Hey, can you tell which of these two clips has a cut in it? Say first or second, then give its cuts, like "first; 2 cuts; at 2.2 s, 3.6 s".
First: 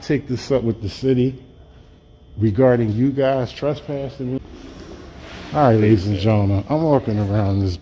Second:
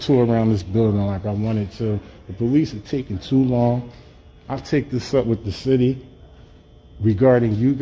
first; 1 cut; at 4.4 s